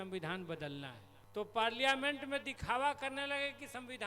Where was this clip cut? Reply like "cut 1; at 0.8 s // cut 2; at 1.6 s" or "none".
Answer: cut 1; at 1.0 s